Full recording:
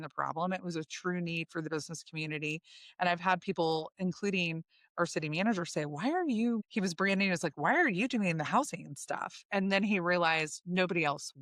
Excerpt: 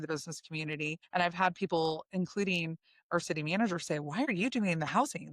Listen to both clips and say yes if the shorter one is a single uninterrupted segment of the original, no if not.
no